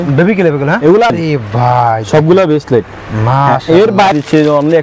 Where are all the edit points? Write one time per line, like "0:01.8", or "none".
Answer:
0:01.1
0:04.1